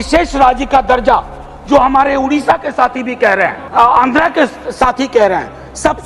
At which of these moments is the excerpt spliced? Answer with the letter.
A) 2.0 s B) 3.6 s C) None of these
B